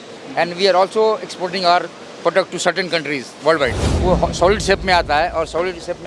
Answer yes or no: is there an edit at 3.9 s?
yes